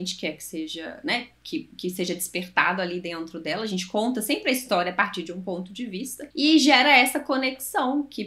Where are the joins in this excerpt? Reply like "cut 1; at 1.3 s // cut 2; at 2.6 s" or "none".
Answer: cut 1; at 6.2 s